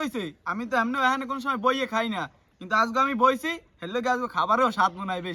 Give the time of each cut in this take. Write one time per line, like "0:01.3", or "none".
none